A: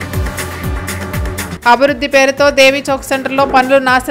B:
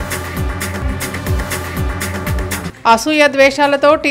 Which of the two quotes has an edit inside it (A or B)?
B